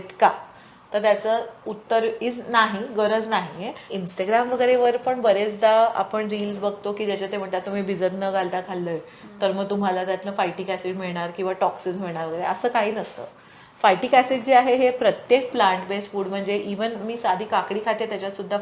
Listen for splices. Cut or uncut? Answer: cut